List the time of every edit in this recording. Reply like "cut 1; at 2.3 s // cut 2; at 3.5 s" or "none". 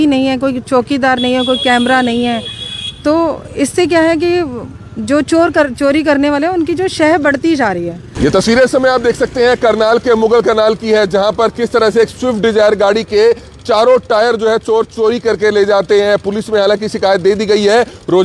cut 1; at 8.0 s